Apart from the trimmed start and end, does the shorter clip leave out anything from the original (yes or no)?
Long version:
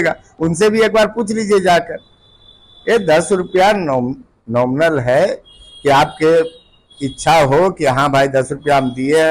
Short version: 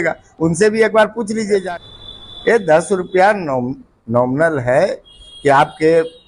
yes